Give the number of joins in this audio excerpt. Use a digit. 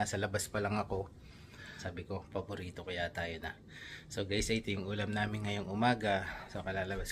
1